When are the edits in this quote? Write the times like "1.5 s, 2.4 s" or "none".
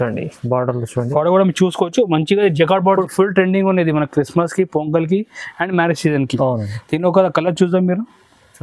3.0 s